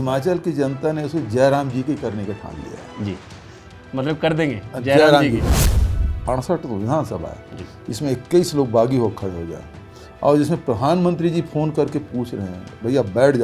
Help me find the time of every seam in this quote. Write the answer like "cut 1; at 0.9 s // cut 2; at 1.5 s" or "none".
cut 1; at 5.7 s